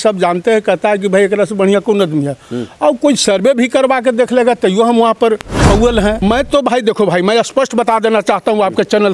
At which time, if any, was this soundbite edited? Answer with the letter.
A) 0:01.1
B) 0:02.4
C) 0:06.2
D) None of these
C